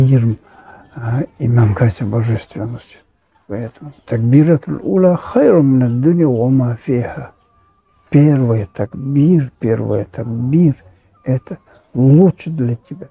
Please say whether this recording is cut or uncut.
cut